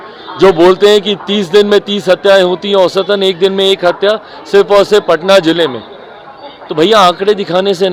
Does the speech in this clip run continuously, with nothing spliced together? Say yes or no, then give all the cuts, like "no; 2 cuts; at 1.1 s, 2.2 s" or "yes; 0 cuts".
yes; 0 cuts